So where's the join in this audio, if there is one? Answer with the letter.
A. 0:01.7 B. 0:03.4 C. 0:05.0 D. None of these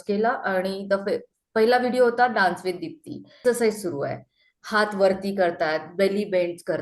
B